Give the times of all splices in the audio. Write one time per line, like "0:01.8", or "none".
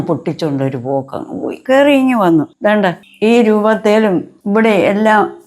0:01.5
0:02.8
0:04.3